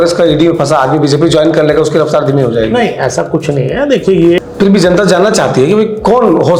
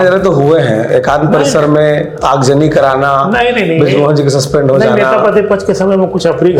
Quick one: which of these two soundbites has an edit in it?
first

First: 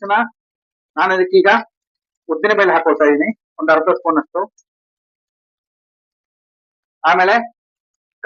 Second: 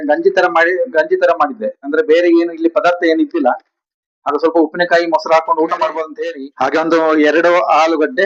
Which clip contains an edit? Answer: second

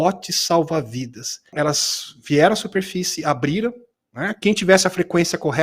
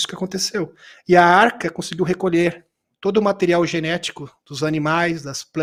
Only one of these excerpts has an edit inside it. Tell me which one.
first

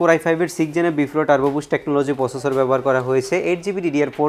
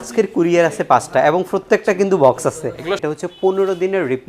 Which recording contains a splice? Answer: second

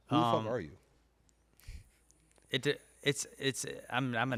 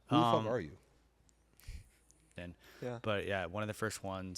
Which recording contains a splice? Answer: second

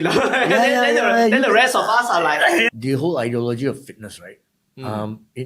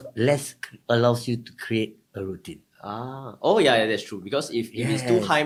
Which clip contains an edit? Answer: first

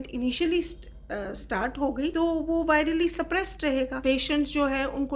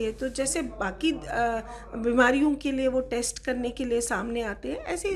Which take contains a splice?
first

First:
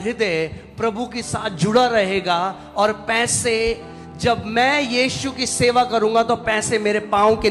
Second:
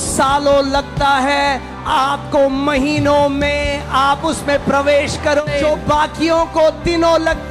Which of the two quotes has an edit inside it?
second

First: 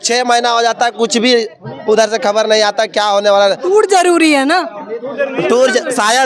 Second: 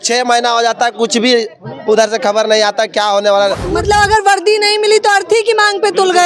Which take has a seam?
second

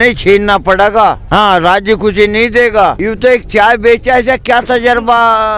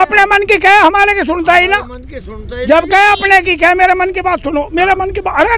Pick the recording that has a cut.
first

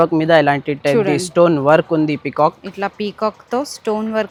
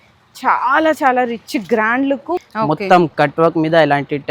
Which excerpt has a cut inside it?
second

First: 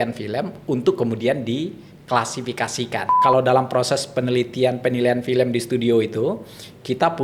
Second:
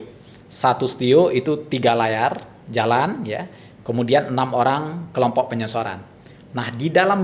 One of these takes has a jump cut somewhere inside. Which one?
first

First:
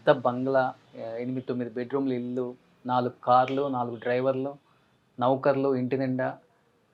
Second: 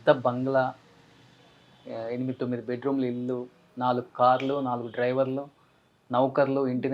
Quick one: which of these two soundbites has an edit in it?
first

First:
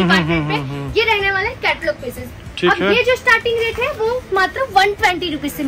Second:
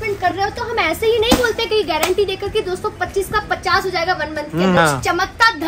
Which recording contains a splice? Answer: second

